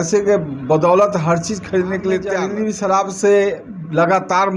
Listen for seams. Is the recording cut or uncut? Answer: cut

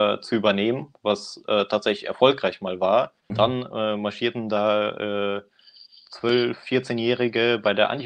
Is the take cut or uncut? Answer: cut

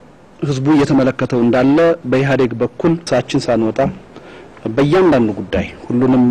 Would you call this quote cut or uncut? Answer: uncut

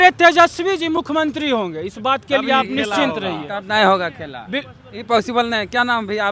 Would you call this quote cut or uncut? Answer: uncut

